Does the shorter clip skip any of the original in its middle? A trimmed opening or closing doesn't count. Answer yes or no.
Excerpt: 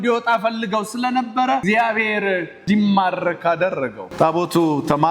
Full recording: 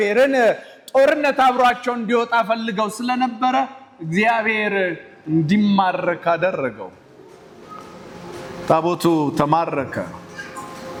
yes